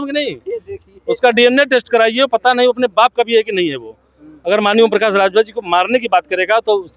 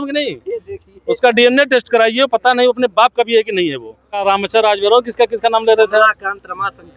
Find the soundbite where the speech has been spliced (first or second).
second